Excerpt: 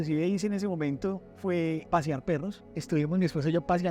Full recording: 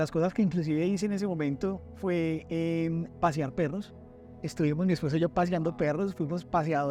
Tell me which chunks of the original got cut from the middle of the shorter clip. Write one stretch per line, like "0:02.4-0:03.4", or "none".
0:02.4-0:03.1
0:04.0-0:04.4